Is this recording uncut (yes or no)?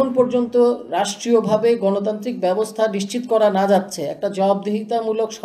yes